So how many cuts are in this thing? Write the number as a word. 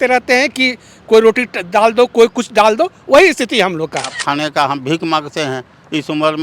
one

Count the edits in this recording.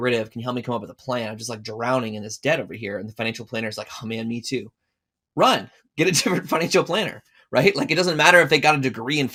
zero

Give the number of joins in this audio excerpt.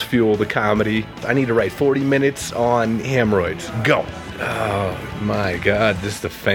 two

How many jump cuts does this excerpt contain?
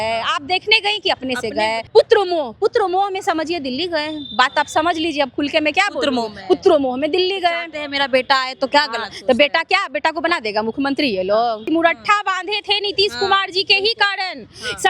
two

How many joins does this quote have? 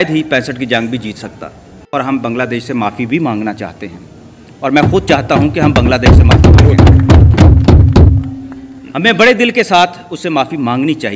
one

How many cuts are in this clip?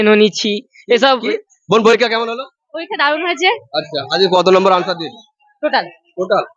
one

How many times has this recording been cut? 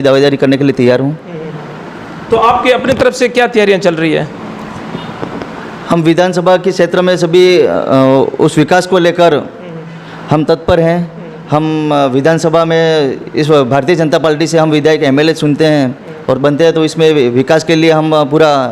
zero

